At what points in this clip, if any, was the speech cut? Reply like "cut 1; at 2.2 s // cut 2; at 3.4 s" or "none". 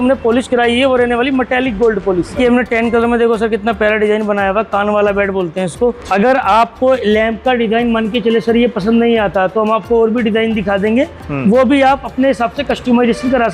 cut 1; at 2.4 s // cut 2; at 6.0 s

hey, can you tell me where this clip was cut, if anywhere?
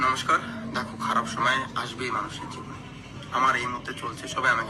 none

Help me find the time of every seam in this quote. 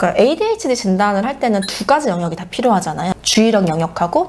none

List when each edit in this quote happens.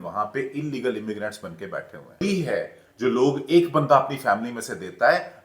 cut 1; at 2.2 s

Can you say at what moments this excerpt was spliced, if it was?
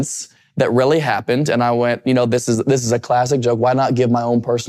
none

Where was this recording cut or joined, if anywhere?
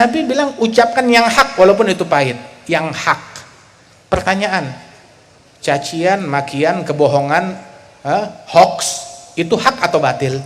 none

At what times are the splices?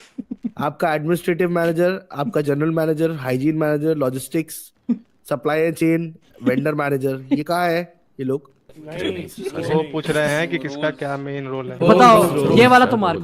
cut 1; at 8.8 s

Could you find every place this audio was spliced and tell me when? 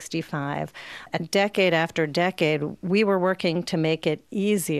cut 1; at 1.1 s

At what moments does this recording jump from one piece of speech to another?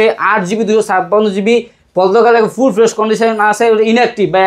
none

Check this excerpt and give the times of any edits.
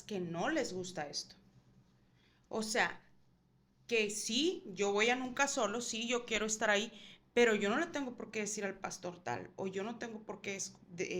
none

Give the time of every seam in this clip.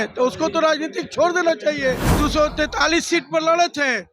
cut 1; at 2.2 s

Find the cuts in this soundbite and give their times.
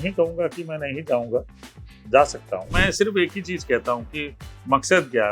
cut 1; at 2.8 s

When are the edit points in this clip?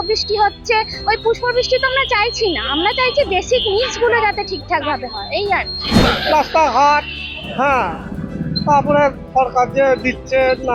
cut 1; at 5.9 s

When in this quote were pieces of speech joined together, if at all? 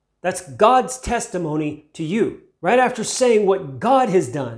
cut 1; at 2.5 s

